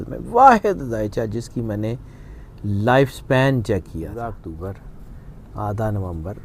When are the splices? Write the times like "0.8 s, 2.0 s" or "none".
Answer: 4.1 s